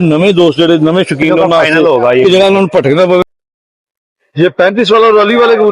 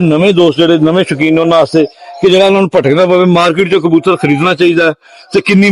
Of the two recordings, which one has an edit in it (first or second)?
first